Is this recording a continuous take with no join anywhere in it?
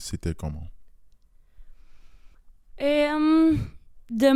yes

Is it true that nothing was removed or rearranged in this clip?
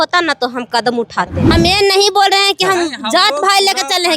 no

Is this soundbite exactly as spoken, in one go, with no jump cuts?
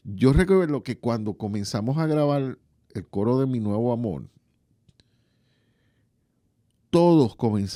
yes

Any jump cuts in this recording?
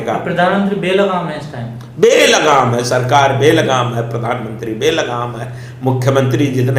no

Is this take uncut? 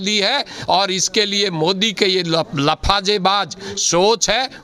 yes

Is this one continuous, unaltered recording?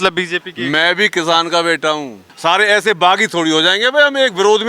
no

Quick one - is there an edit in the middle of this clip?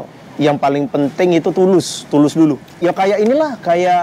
yes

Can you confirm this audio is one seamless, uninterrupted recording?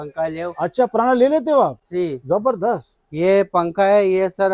yes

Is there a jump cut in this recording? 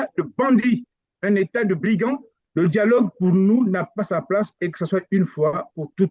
yes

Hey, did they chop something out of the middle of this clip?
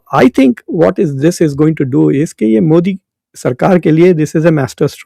no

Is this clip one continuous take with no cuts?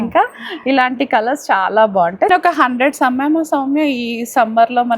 no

